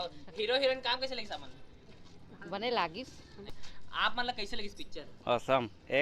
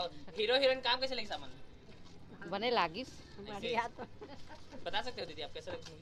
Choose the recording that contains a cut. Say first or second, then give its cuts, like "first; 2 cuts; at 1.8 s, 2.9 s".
first; 1 cut; at 3.5 s